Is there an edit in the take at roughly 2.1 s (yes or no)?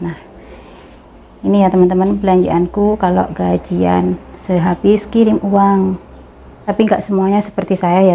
no